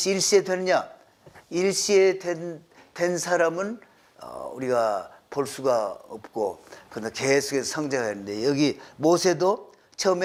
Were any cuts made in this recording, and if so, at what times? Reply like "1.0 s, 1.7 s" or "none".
none